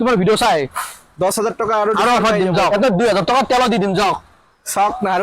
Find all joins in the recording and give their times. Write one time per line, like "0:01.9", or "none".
0:02.7